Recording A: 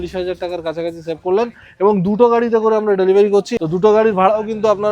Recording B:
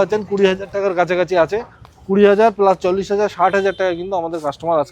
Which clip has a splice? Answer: A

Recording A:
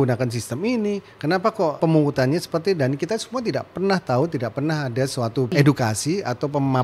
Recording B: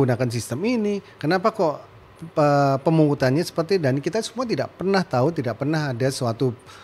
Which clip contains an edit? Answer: A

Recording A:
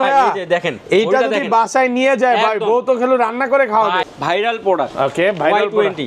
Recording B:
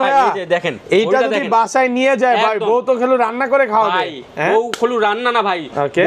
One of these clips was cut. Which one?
A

